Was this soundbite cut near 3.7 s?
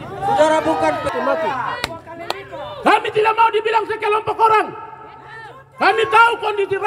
no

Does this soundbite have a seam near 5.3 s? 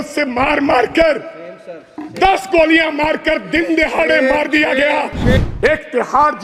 yes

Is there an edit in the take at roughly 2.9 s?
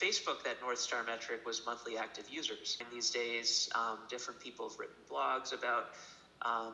yes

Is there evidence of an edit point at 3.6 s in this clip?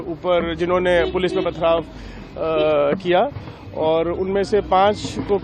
no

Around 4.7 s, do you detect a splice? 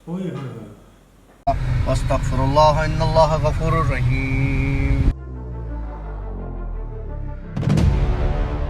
no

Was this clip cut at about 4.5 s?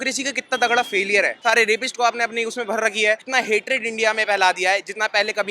no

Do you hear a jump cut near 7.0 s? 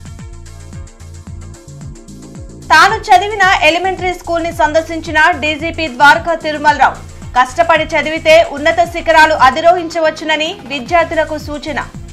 no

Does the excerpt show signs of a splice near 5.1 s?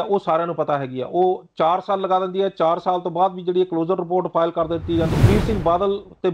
yes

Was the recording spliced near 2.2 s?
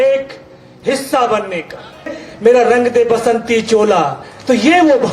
yes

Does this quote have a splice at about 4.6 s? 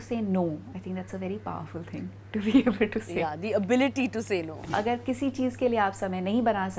yes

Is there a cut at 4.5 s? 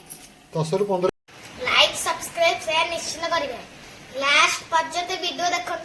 no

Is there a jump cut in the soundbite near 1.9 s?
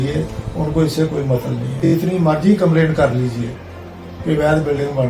yes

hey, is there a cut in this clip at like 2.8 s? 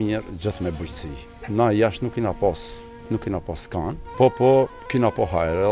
no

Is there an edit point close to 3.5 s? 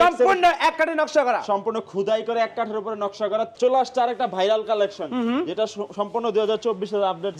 yes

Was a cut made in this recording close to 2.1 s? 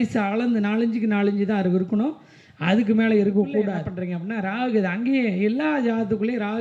no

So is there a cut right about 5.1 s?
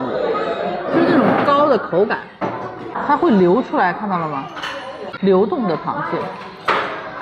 yes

